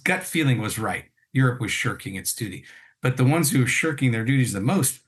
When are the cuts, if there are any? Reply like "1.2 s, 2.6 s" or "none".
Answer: none